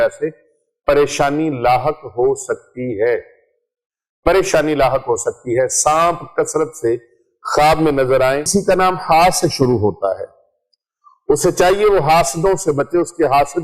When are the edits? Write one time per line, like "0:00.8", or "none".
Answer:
0:08.5